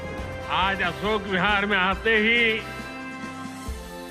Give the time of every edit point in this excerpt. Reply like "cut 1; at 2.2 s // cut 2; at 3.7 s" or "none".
none